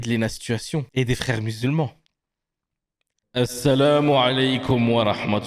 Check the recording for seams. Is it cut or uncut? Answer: uncut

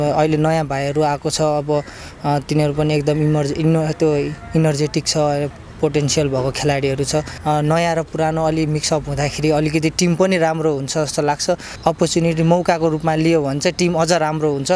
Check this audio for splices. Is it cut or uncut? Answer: cut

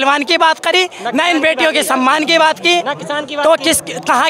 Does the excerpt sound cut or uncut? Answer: uncut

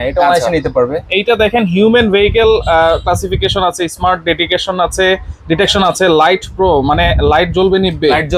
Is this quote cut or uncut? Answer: uncut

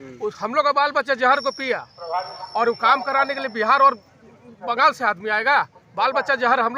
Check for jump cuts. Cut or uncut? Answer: uncut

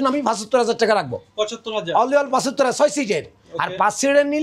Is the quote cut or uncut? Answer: uncut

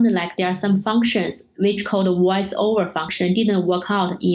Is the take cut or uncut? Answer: cut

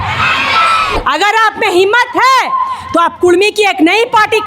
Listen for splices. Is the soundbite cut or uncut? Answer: cut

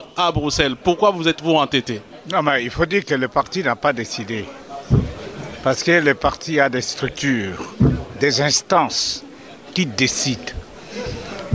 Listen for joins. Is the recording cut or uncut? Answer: cut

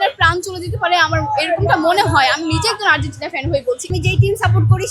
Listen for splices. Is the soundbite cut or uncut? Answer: cut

